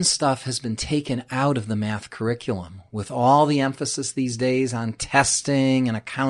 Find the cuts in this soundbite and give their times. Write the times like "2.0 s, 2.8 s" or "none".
none